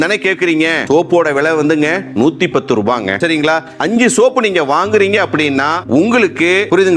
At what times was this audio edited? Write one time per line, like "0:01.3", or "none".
0:03.8

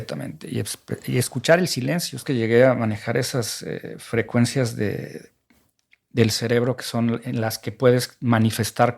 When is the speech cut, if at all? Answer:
0:02.2

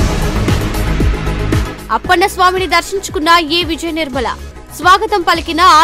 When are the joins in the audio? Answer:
0:01.5

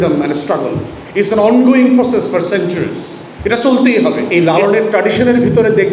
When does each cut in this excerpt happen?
0:04.3

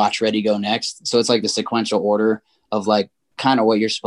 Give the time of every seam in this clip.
none

